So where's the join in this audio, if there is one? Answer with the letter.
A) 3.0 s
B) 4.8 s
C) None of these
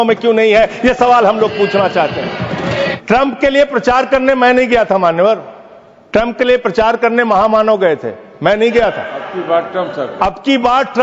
A